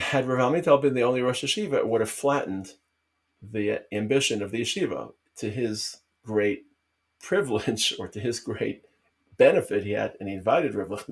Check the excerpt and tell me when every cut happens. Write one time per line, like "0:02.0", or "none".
none